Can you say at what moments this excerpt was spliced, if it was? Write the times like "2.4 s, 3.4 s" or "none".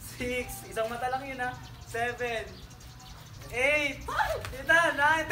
none

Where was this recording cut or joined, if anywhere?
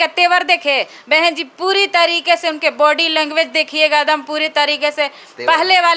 none

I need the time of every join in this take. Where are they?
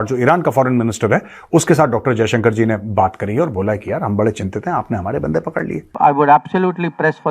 5.9 s

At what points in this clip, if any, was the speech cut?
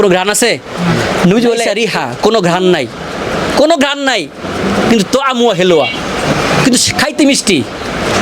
1.7 s

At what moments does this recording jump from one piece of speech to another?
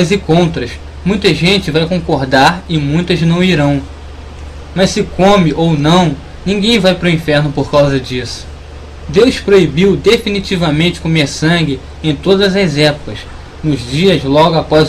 11.2 s

